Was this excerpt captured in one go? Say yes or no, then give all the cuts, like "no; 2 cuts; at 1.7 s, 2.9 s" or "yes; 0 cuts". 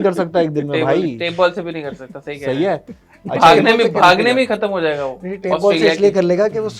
yes; 0 cuts